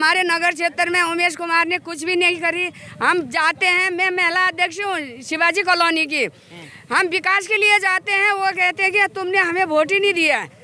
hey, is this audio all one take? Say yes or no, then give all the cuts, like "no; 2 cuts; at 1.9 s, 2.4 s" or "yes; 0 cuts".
yes; 0 cuts